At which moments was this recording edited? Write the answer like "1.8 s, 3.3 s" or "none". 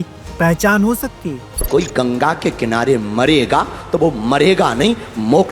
1.7 s